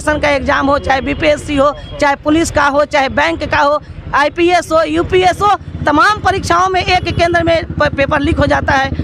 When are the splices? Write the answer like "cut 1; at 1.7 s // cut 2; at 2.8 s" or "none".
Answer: none